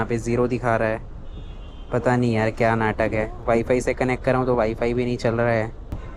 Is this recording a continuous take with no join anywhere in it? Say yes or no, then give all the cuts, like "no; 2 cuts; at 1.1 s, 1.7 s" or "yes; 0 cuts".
yes; 0 cuts